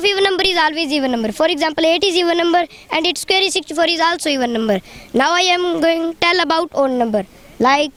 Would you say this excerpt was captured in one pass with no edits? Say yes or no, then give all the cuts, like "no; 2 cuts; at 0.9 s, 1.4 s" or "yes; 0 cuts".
yes; 0 cuts